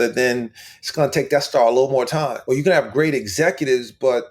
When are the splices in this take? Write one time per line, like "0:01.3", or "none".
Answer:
0:02.4